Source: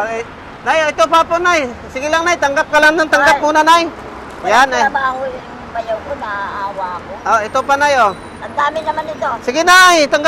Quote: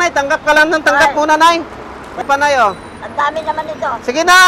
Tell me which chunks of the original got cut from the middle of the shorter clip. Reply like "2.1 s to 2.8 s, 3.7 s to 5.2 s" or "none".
4.5 s to 7.6 s